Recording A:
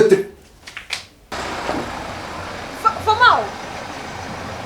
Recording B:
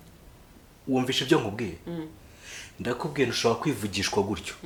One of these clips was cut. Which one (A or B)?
A